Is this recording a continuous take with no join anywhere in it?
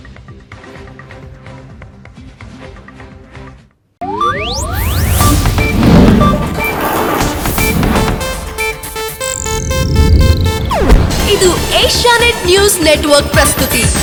yes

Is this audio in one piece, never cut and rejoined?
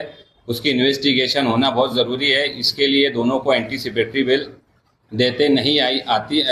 yes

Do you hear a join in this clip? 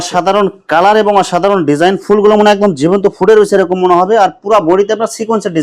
no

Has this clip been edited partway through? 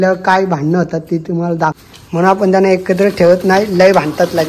yes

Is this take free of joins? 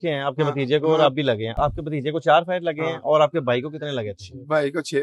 no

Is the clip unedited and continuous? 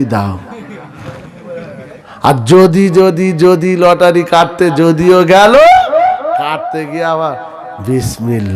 no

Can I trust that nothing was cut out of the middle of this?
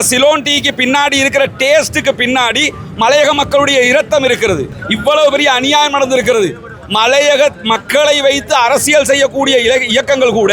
no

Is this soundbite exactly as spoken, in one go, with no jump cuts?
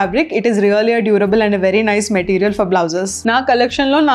no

